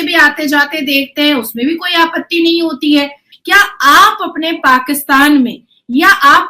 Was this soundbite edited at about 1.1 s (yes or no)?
no